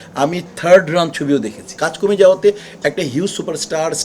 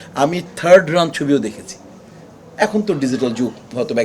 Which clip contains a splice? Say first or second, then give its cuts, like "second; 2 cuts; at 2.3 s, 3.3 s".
first; 1 cut; at 1.8 s